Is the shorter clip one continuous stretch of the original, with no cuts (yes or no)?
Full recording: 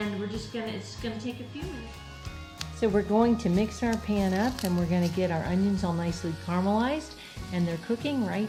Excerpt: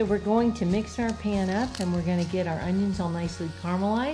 yes